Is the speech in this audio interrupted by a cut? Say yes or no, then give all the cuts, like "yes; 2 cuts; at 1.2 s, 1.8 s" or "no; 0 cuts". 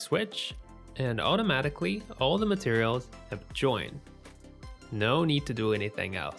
no; 0 cuts